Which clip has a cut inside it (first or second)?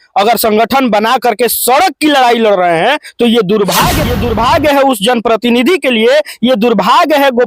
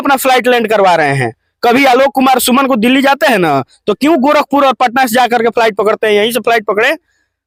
first